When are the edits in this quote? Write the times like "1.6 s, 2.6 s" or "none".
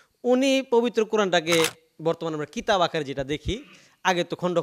none